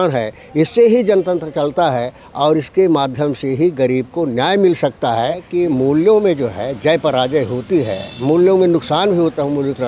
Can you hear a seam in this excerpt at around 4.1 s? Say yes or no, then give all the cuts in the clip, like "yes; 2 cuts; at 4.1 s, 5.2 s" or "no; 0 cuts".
no; 1 cut; at 5.4 s